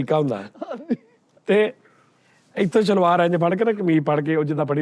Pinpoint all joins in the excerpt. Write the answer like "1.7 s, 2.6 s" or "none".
none